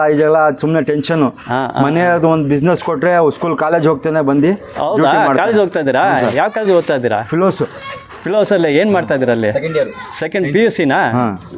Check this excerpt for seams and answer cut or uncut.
uncut